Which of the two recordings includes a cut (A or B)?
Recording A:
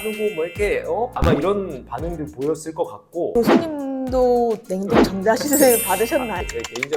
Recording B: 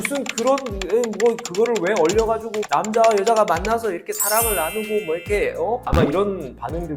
A